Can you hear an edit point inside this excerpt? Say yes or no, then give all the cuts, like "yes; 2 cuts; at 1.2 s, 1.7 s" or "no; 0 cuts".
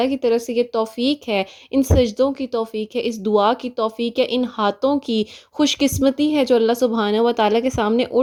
no; 0 cuts